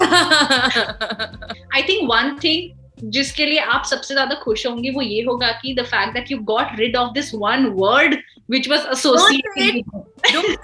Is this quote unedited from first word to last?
no; 1 cut; at 1.4 s

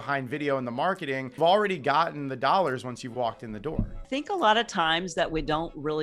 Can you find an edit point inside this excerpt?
yes; 2 cuts; at 1.3 s, 4.1 s

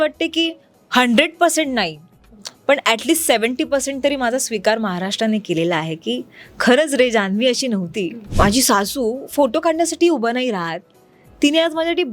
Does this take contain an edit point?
yes; 1 cut; at 8.2 s

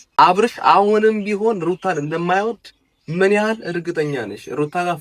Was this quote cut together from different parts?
no; 0 cuts

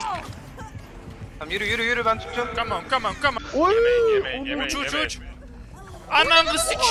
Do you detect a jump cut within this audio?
yes; 1 cut; at 3.4 s

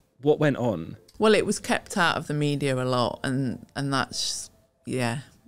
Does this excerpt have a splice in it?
no; 0 cuts

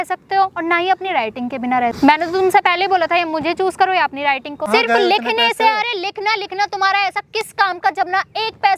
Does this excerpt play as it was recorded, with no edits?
no; 2 cuts; at 1.9 s, 4.7 s

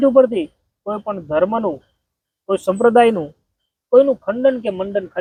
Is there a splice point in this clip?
no; 0 cuts

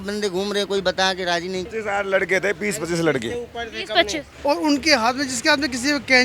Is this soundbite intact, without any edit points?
no; 2 cuts; at 1.7 s, 4.3 s

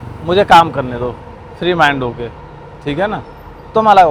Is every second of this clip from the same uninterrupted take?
yes; 0 cuts

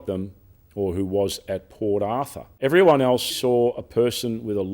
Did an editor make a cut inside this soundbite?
yes; 2 cuts; at 2.4 s, 3.3 s

